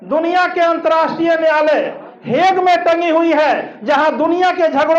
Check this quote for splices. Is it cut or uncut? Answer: uncut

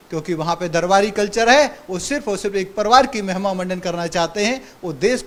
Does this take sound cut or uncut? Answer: uncut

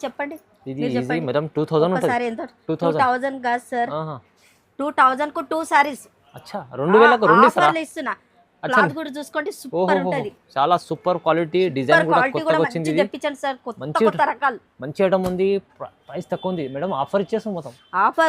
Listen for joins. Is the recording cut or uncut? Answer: uncut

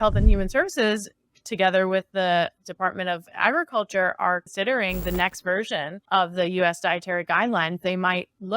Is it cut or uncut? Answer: cut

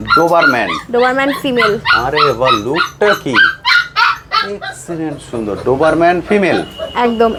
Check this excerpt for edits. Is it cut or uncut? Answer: uncut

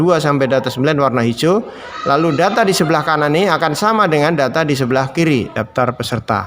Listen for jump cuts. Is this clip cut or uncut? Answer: cut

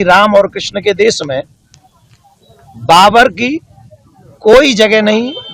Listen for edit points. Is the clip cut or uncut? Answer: uncut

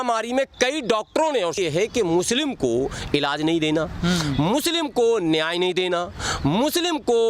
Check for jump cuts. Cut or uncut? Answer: cut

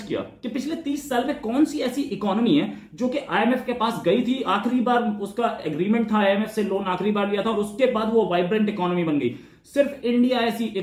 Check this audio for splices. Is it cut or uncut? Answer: uncut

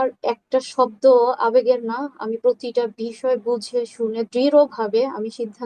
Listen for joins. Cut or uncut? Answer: uncut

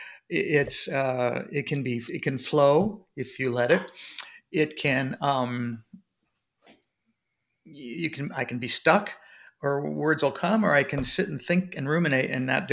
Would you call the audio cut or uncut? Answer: uncut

